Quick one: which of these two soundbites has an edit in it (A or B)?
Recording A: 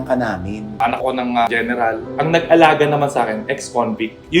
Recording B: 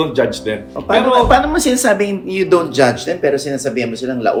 A